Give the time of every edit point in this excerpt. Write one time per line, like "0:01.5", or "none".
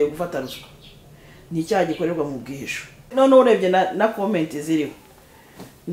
0:03.1